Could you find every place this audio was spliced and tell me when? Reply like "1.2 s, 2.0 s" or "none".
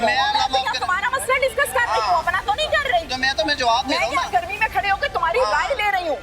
none